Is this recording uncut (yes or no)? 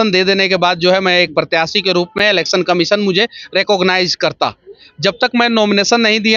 yes